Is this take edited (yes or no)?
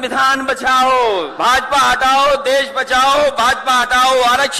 yes